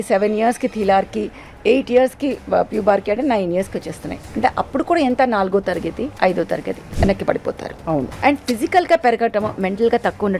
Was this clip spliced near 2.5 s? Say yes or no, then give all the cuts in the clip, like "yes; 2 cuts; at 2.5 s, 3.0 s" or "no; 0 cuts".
no; 3 cuts; at 6.1 s, 6.8 s, 8.1 s